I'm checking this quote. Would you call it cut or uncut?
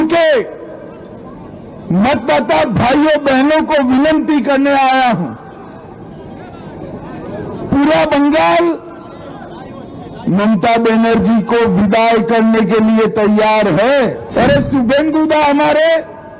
cut